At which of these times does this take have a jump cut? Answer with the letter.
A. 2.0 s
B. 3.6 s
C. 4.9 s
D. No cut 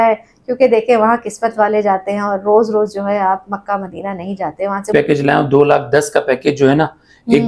C